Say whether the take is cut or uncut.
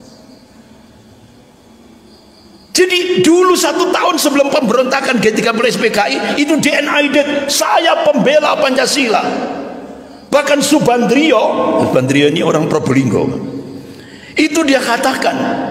uncut